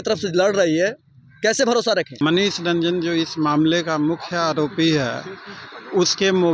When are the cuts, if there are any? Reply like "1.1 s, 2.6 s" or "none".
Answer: 2.1 s